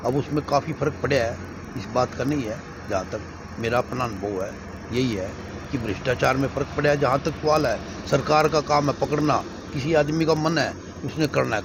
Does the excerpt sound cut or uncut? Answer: uncut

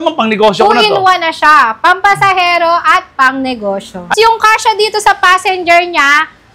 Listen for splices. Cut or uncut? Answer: cut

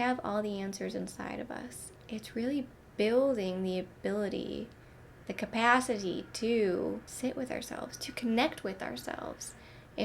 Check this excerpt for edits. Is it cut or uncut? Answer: cut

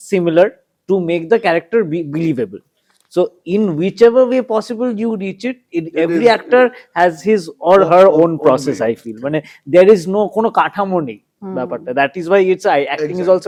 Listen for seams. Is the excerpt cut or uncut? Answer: uncut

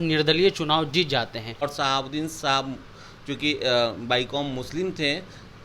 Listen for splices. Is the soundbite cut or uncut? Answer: cut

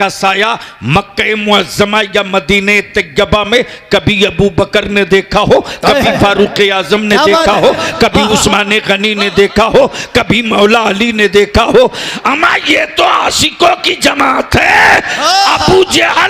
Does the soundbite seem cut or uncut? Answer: uncut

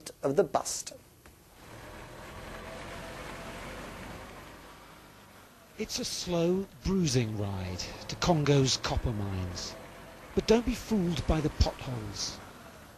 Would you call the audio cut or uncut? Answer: cut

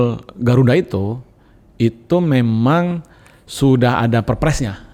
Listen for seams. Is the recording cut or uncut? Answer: uncut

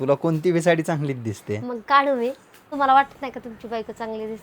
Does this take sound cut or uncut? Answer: cut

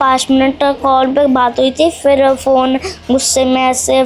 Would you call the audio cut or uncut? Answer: uncut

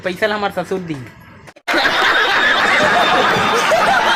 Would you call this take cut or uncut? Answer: uncut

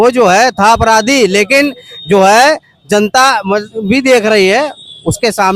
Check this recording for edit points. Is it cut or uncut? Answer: uncut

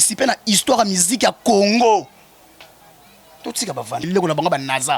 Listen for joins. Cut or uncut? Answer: cut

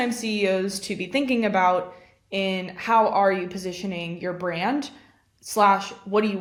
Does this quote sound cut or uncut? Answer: uncut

